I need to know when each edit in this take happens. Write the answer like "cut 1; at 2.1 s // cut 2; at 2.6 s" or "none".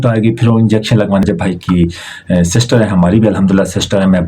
cut 1; at 1.2 s